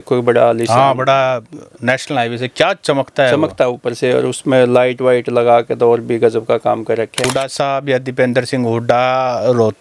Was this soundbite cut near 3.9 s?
no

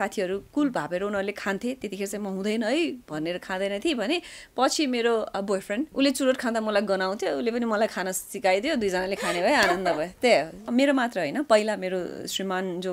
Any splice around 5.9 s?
yes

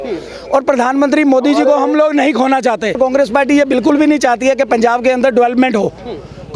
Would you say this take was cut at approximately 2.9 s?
yes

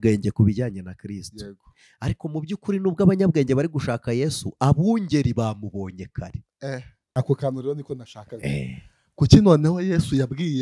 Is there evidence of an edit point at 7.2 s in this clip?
yes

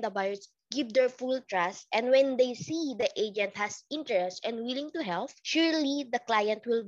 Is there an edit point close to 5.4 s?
yes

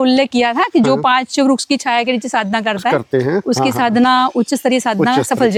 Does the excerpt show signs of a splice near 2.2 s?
no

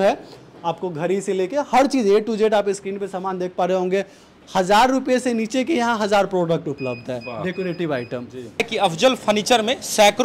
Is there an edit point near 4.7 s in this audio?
no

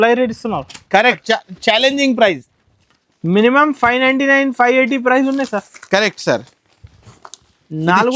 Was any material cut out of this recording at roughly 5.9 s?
no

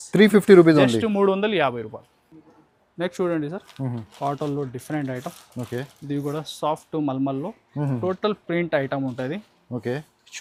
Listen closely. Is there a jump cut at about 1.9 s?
no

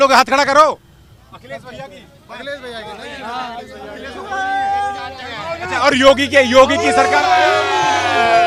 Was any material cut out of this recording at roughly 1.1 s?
no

